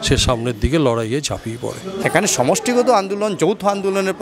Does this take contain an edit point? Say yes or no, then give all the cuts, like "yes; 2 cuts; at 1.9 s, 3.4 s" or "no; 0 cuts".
no; 0 cuts